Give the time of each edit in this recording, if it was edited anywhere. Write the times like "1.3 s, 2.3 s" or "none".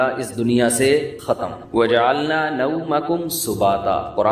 1.3 s